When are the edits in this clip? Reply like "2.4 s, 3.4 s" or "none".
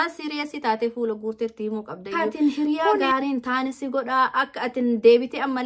2.1 s